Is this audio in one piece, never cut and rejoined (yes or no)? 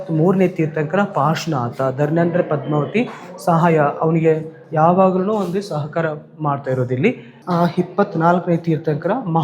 no